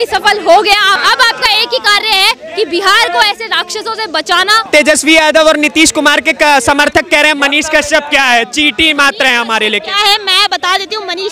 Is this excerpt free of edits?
no; 2 cuts; at 1.0 s, 4.7 s

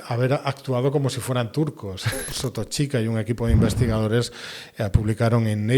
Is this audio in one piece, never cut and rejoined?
no; 1 cut; at 2.3 s

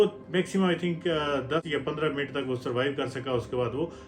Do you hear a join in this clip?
yes; 1 cut; at 1.7 s

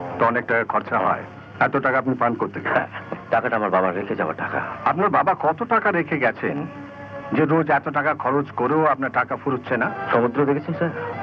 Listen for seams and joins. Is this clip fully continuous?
no; 4 cuts; at 1.4 s, 3.1 s, 4.7 s, 10.0 s

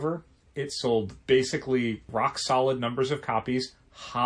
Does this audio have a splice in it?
yes; 2 cuts; at 1.1 s, 2.0 s

